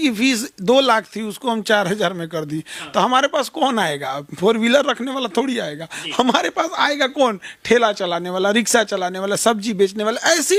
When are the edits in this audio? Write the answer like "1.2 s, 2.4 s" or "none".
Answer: none